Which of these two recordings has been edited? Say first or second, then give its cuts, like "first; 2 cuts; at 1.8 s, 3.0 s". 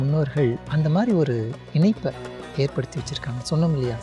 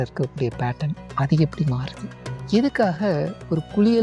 second; 1 cut; at 1.0 s